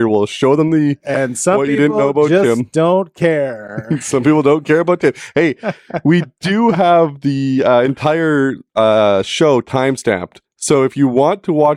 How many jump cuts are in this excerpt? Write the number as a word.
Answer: zero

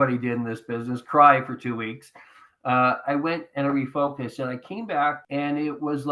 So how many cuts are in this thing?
one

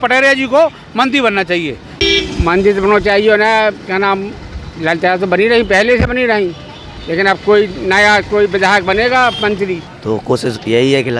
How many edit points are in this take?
two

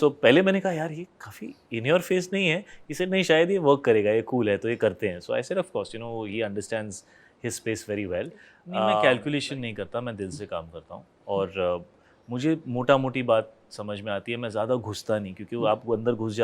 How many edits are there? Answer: one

